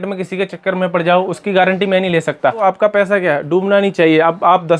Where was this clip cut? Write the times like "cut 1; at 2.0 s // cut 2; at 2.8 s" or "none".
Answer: cut 1; at 2.6 s